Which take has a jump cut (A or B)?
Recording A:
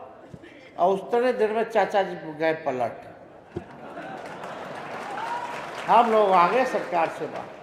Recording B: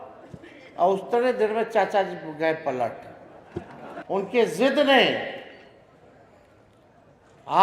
B